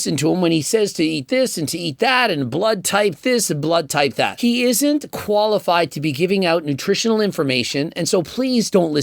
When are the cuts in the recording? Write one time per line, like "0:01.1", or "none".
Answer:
0:04.3